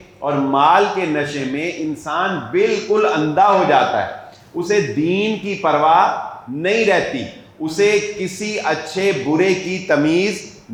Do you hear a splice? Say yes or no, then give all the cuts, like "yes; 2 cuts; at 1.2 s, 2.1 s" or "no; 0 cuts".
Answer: no; 0 cuts